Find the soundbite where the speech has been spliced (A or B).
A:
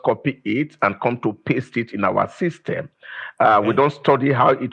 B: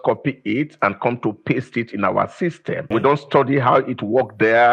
B